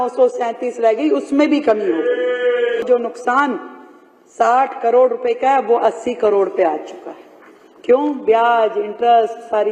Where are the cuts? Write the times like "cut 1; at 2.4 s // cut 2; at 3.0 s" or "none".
cut 1; at 2.9 s